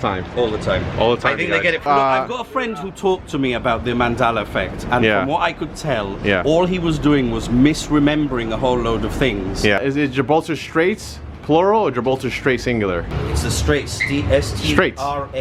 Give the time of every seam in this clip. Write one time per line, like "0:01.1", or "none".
0:01.9
0:09.8
0:13.1